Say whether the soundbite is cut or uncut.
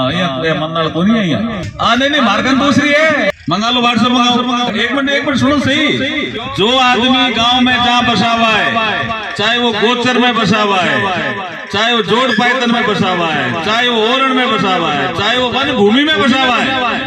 cut